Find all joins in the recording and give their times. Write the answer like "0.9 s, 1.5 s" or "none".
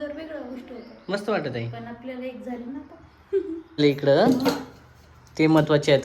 3.8 s